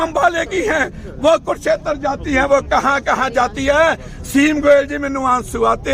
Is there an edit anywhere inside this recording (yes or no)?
no